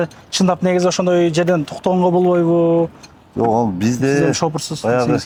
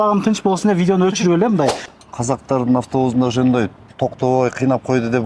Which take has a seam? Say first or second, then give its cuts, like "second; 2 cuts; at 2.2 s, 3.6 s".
second; 1 cut; at 1.9 s